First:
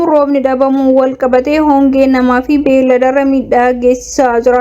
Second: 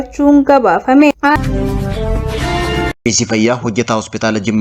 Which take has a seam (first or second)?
second